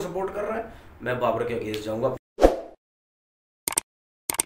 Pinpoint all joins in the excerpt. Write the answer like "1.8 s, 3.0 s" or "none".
2.2 s